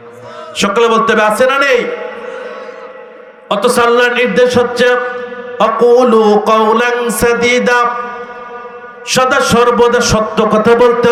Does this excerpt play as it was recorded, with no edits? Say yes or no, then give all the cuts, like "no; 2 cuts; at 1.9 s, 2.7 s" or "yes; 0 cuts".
yes; 0 cuts